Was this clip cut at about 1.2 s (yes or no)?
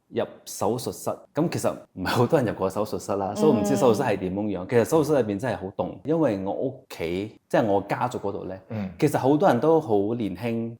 yes